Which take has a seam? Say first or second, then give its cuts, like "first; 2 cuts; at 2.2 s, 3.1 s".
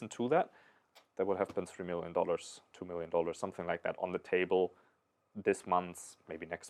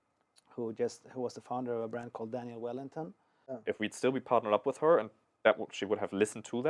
second; 1 cut; at 3.6 s